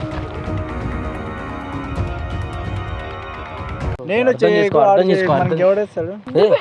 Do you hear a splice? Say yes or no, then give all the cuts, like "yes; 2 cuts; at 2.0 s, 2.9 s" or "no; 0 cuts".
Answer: no; 0 cuts